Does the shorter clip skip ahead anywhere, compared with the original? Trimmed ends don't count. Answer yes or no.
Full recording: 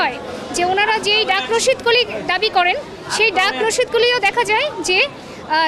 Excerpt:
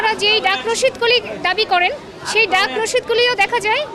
no